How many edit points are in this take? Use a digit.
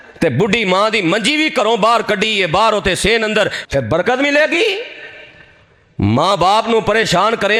0